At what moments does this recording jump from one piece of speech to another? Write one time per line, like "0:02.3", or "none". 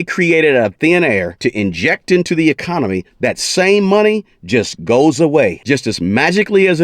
0:01.3
0:05.6